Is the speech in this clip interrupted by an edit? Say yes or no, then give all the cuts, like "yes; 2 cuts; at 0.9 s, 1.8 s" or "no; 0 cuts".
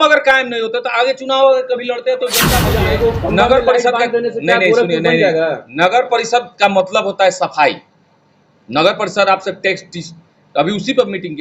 yes; 1 cut; at 2.5 s